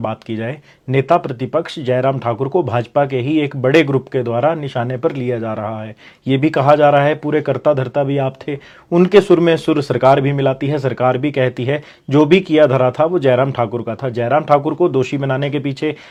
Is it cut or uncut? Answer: uncut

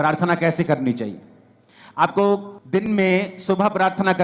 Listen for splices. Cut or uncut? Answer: cut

